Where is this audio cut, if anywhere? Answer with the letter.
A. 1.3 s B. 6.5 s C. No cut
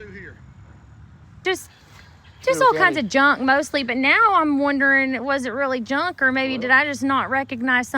A